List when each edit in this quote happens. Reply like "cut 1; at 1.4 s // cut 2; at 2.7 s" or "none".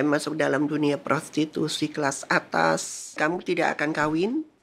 cut 1; at 3.2 s